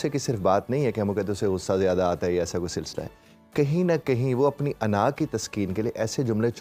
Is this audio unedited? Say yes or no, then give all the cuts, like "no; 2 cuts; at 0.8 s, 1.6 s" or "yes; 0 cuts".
yes; 0 cuts